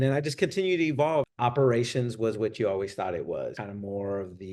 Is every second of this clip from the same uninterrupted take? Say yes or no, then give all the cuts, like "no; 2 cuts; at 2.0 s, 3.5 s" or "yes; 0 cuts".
no; 2 cuts; at 1.3 s, 3.6 s